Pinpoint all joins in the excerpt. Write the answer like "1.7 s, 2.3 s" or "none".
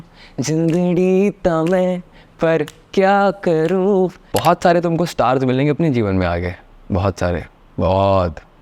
4.2 s